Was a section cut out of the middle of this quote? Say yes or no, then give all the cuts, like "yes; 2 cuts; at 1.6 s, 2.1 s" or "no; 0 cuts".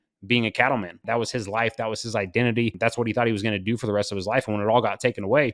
yes; 2 cuts; at 1.0 s, 2.8 s